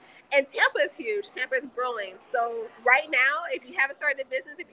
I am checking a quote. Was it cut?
yes; 1 cut; at 2.5 s

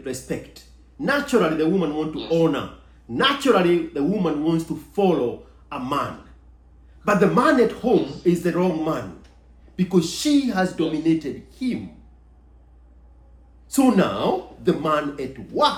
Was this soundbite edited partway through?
no; 0 cuts

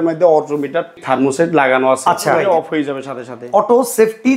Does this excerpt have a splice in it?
yes; 2 cuts; at 1.0 s, 2.4 s

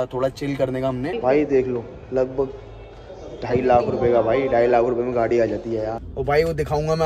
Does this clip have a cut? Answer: yes; 2 cuts; at 1.1 s, 6.0 s

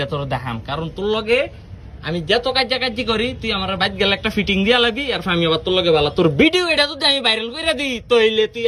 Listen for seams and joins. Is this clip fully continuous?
yes; 0 cuts

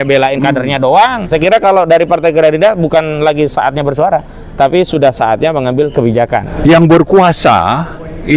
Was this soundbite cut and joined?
yes; 2 cuts; at 1.3 s, 6.5 s

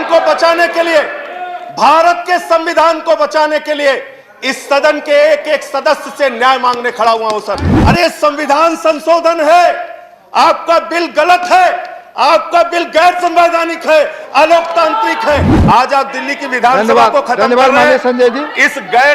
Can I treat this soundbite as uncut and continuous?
no; 2 cuts; at 7.7 s, 15.5 s

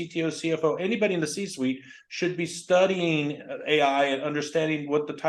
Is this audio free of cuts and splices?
yes; 0 cuts

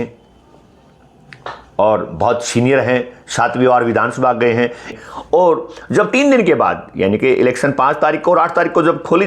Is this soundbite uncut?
no; 1 cut; at 5.0 s

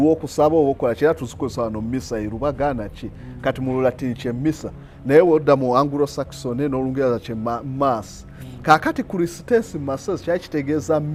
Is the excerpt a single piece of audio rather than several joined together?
yes; 0 cuts

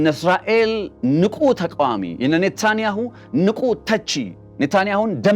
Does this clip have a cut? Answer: yes; 2 cuts; at 0.9 s, 4.4 s

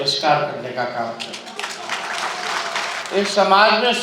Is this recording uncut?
no; 1 cut; at 3.0 s

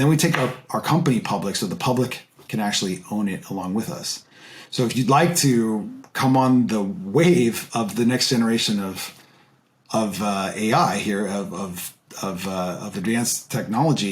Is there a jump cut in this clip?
no; 0 cuts

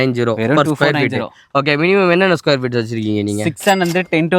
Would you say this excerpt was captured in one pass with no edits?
yes; 0 cuts

